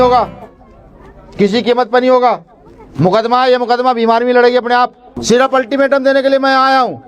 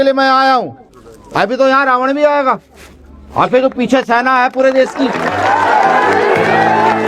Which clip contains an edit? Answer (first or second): first